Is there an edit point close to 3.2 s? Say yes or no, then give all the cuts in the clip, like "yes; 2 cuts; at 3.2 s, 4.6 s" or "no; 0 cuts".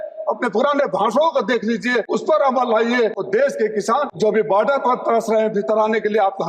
yes; 3 cuts; at 2.1 s, 3.2 s, 4.1 s